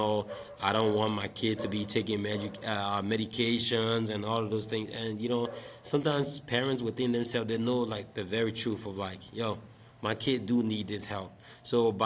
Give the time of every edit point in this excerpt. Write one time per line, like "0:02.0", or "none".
none